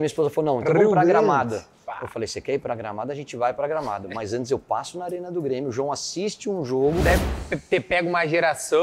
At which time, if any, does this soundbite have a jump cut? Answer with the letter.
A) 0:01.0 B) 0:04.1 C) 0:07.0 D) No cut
C